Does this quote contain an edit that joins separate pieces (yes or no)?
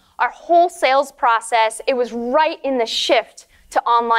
no